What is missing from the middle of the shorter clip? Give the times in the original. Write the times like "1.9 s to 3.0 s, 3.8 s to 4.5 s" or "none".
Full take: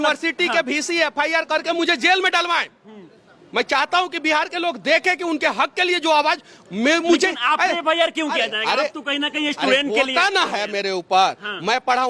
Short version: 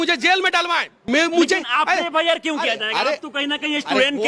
2.7 s to 6.6 s